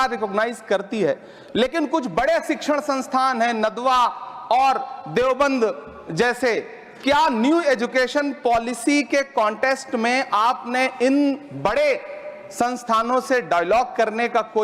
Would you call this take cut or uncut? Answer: uncut